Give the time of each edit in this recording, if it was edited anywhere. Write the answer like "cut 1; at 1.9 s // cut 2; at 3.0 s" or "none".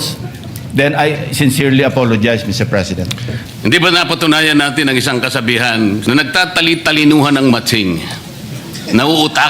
cut 1; at 3.4 s // cut 2; at 6.0 s